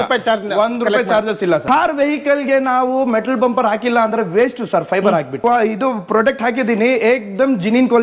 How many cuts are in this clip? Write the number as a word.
two